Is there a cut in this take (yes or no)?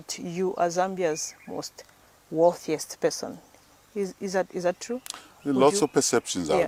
no